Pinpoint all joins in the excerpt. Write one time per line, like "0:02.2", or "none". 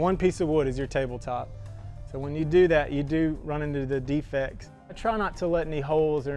0:04.9